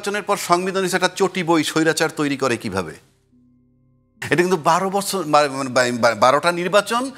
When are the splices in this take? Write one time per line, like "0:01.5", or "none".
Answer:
none